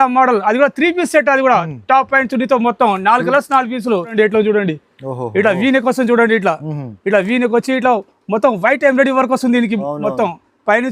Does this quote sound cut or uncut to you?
cut